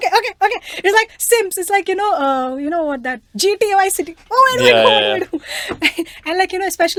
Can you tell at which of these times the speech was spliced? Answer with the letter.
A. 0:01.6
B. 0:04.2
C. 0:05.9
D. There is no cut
D